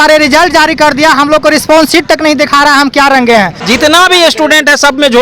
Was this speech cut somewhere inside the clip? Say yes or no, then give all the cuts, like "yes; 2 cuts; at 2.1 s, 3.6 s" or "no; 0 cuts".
yes; 1 cut; at 3.6 s